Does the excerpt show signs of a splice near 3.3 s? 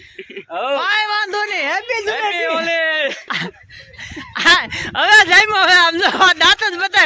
yes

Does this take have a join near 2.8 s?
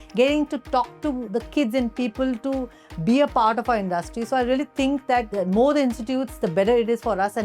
no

